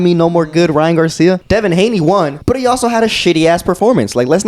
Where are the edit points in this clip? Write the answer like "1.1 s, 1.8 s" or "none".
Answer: 1.4 s, 2.4 s